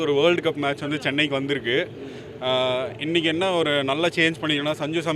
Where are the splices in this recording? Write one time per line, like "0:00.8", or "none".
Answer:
none